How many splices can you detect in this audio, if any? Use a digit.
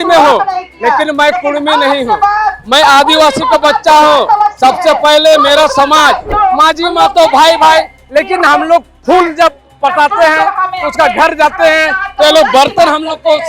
1